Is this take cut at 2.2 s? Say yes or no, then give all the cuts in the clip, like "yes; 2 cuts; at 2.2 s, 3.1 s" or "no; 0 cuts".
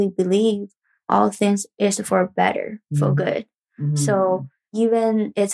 no; 2 cuts; at 1.0 s, 4.7 s